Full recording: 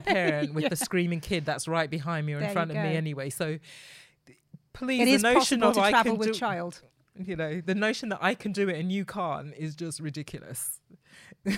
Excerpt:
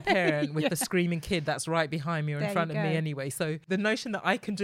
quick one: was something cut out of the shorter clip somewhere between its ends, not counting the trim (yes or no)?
yes